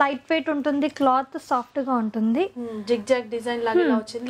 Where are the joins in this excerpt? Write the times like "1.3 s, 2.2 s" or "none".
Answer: none